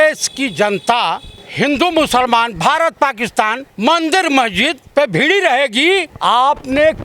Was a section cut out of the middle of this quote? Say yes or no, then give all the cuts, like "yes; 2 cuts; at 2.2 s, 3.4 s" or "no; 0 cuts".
yes; 4 cuts; at 1.4 s, 3.6 s, 4.8 s, 6.1 s